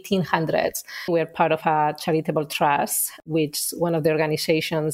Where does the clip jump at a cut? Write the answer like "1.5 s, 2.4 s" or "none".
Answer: 1.1 s